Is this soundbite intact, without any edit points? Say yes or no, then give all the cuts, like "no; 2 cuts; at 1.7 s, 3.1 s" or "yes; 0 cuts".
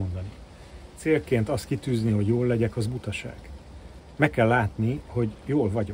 no; 1 cut; at 1.0 s